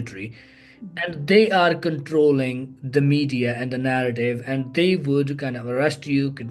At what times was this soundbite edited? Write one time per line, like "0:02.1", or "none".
none